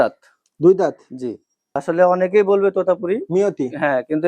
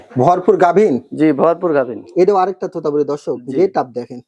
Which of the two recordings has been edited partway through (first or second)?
first